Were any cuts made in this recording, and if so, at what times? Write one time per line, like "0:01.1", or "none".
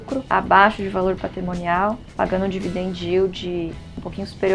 none